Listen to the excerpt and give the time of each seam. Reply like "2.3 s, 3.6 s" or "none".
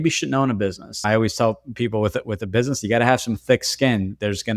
1.0 s